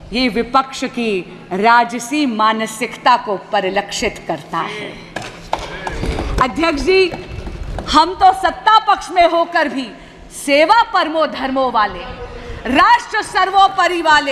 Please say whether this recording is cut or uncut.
uncut